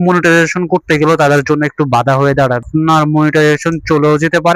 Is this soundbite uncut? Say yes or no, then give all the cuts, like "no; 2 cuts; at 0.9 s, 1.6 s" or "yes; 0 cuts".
no; 1 cut; at 2.6 s